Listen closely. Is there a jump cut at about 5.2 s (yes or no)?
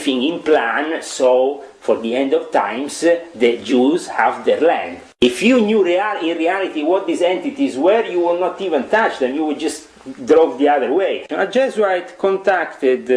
yes